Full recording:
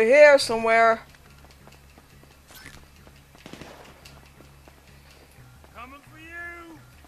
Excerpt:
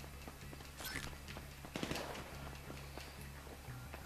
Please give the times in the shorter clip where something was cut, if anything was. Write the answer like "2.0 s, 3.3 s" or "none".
none